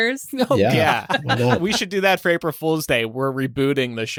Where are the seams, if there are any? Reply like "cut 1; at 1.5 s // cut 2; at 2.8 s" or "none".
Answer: none